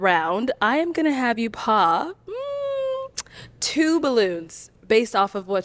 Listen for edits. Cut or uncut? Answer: uncut